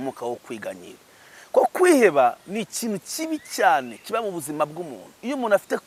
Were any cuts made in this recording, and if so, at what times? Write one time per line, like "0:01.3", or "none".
none